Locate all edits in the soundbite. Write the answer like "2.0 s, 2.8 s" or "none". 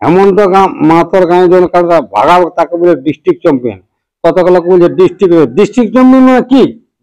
none